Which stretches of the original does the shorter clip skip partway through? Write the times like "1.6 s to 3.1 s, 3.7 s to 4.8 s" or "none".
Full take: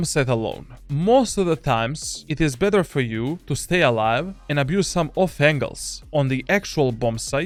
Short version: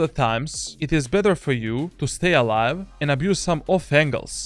none